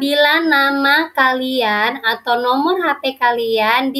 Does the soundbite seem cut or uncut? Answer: uncut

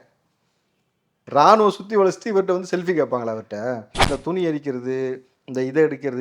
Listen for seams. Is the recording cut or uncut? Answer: cut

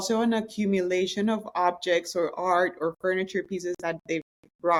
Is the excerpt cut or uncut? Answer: uncut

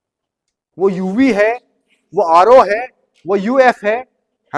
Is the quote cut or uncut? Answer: uncut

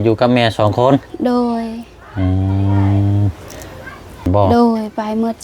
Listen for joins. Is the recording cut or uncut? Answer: cut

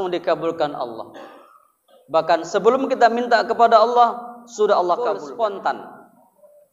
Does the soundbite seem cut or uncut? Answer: cut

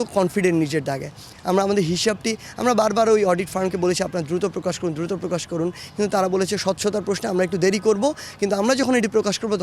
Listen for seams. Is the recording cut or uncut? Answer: uncut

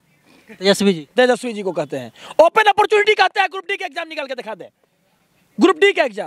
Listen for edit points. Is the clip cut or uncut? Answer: uncut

